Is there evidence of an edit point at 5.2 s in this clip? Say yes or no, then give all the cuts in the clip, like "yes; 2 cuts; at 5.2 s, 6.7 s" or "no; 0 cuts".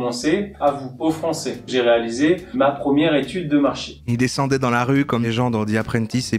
yes; 2 cuts; at 1.7 s, 5.2 s